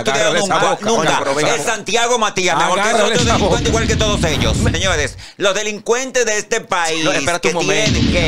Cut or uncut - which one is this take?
cut